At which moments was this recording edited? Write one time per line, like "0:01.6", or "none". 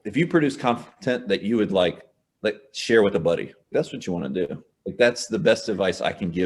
none